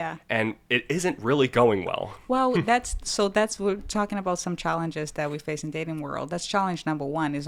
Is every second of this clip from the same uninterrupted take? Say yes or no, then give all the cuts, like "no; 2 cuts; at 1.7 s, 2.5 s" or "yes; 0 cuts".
yes; 0 cuts